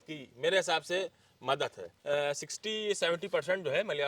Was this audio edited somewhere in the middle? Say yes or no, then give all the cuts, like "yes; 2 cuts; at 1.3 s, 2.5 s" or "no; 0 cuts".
yes; 1 cut; at 1.9 s